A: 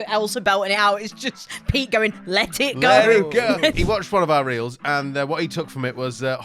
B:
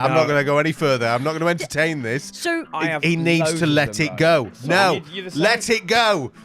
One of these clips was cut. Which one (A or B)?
A